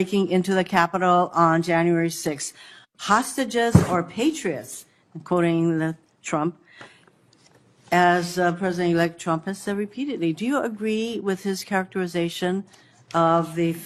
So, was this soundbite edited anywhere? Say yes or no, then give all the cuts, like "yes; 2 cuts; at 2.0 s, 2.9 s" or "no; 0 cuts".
no; 0 cuts